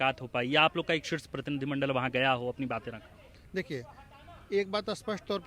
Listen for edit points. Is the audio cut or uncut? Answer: uncut